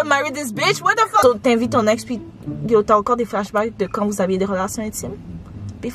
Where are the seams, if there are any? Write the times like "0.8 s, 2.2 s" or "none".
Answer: 1.2 s